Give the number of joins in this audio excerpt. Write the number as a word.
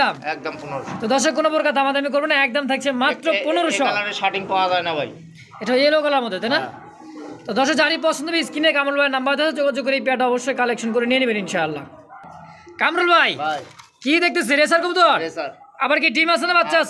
zero